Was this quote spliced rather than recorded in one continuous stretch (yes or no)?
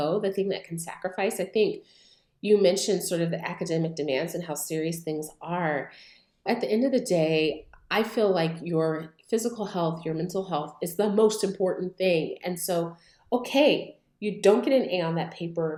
no